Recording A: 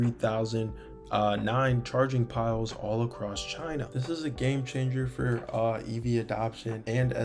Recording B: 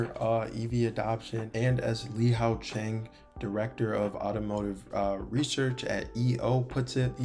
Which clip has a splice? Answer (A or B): A